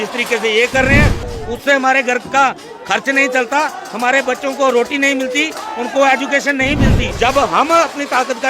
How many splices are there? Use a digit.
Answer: 2